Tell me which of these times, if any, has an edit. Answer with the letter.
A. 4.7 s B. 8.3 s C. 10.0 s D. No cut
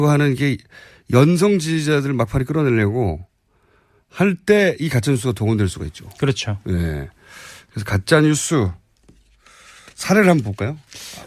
D